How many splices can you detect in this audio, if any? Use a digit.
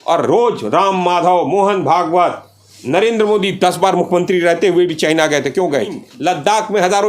1